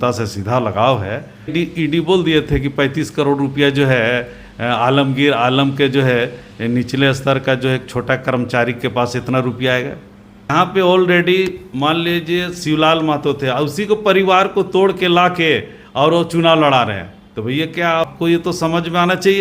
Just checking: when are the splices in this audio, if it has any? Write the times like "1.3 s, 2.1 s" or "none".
1.5 s, 10.5 s, 18.0 s